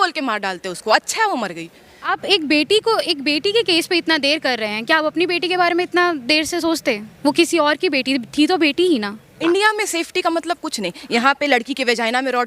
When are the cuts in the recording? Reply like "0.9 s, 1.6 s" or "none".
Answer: 2.1 s, 9.3 s